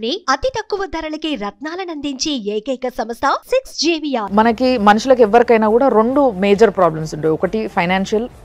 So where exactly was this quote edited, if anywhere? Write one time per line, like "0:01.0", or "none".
0:04.2

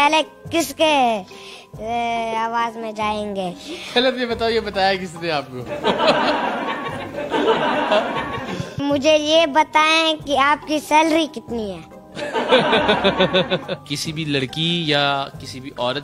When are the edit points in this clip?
0:08.8
0:13.9

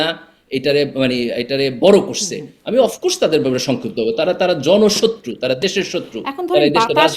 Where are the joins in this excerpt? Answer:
none

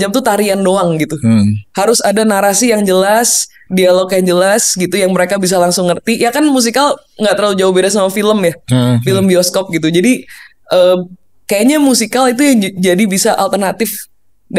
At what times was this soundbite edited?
none

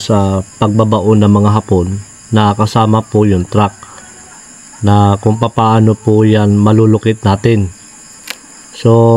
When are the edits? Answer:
none

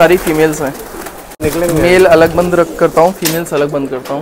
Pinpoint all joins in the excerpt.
0:01.4

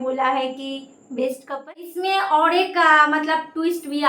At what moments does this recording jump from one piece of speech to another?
0:01.7

